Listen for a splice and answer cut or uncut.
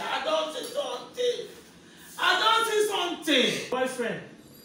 cut